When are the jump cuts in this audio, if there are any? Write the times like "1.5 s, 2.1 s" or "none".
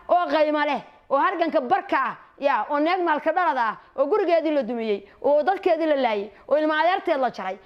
none